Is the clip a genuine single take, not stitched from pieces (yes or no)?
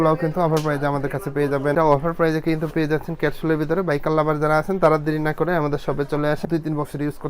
no